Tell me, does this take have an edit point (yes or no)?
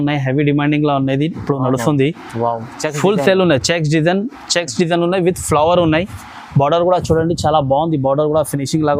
no